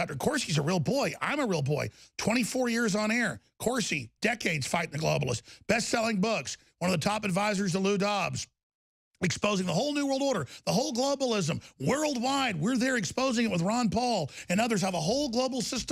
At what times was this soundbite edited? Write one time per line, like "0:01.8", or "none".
none